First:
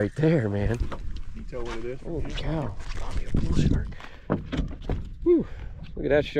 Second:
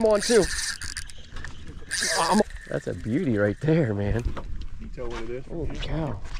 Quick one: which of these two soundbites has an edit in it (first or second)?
second